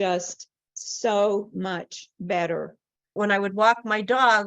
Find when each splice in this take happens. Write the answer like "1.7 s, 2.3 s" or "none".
3.1 s